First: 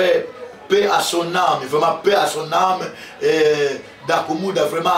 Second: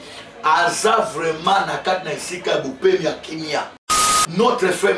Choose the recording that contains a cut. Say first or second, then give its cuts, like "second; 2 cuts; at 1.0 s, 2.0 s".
second; 1 cut; at 3.9 s